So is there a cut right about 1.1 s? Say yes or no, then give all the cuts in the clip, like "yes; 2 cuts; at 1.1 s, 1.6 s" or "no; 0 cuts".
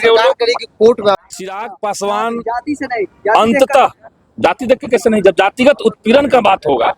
yes; 1 cut; at 1.1 s